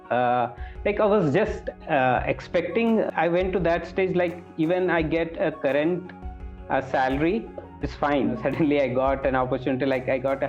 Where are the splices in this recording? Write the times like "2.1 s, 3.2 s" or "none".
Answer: 8.4 s